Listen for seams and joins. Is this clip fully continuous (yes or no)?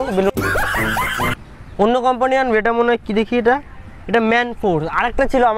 no